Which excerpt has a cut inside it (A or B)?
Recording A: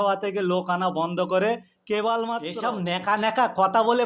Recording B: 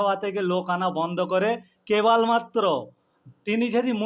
A